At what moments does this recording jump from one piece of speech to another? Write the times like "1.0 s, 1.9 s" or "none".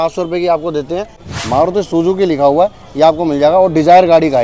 1.2 s